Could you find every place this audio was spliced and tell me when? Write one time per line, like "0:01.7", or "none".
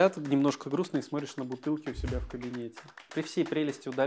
0:03.1